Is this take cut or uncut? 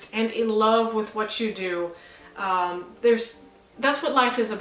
uncut